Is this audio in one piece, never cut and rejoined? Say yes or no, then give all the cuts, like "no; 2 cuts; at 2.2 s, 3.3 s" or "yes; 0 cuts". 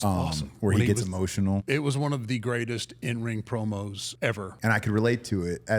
no; 2 cuts; at 1.6 s, 4.5 s